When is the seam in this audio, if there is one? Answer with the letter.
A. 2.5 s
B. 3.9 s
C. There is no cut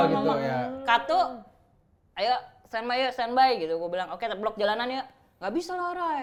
C